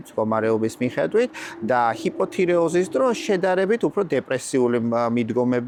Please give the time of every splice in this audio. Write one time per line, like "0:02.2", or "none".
none